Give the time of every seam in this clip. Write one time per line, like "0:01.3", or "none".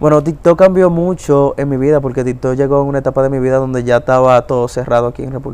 none